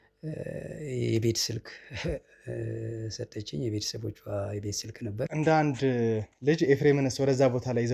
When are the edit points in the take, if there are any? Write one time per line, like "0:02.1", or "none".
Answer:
0:05.3